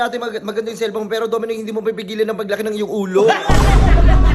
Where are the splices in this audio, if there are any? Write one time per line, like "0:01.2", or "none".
none